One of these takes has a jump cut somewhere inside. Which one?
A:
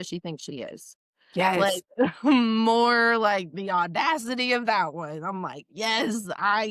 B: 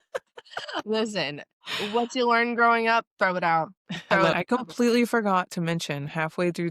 B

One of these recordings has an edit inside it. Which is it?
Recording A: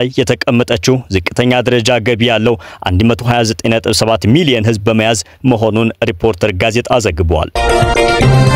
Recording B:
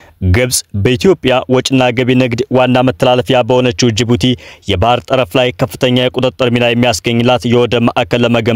A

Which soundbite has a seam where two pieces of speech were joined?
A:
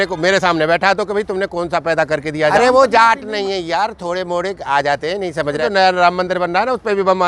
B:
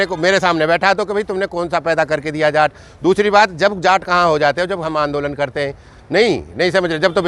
A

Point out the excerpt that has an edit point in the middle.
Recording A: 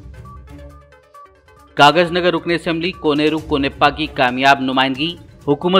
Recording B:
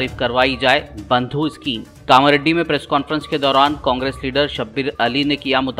A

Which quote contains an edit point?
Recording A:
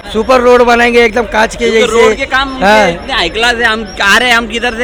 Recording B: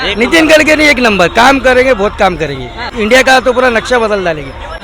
B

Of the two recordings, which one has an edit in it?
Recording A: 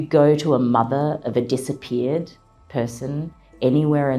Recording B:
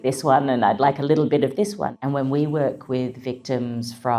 B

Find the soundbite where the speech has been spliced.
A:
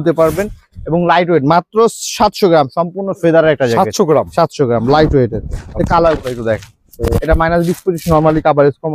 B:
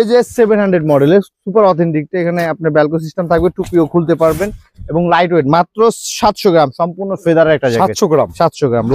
A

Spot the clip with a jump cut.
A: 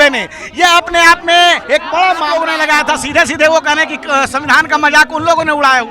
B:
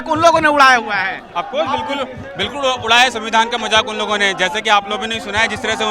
A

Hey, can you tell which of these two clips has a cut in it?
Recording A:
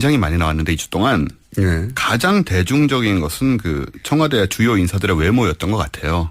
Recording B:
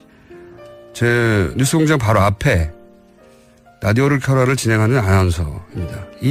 A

